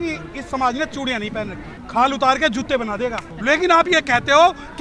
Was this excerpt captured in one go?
no; 2 cuts; at 1.7 s, 3.4 s

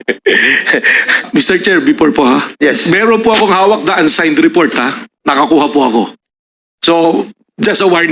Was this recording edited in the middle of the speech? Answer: yes; 1 cut; at 1.3 s

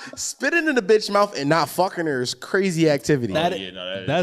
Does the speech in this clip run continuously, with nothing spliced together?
yes; 0 cuts

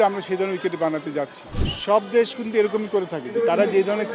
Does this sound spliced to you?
yes; 1 cut; at 1.4 s

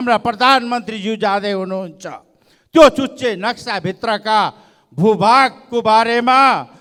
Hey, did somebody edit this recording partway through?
no; 0 cuts

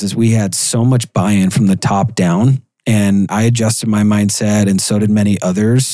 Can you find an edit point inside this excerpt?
no; 0 cuts

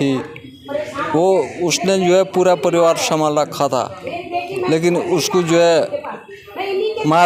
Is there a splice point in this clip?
no; 0 cuts

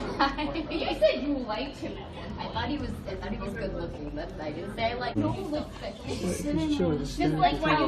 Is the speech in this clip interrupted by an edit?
no; 0 cuts

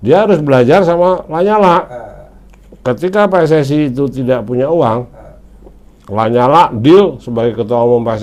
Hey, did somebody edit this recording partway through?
no; 0 cuts

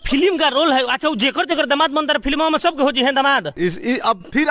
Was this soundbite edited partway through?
no; 0 cuts

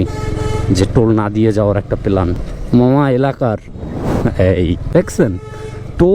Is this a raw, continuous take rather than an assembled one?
no; 2 cuts; at 2.5 s, 4.9 s

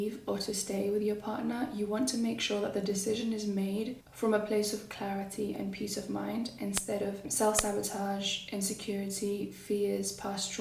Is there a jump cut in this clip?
yes; 1 cut; at 7.3 s

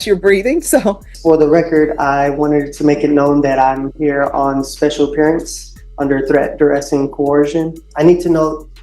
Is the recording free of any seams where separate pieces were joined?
no; 2 cuts; at 1.1 s, 7.9 s

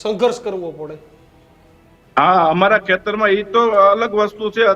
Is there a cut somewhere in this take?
no; 0 cuts

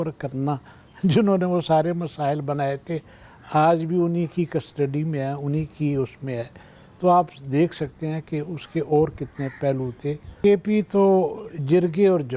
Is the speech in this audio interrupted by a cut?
yes; 1 cut; at 10.3 s

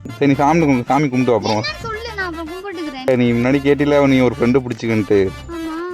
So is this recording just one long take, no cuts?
no; 1 cut; at 3.1 s

